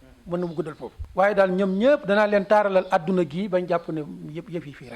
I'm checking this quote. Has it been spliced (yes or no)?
yes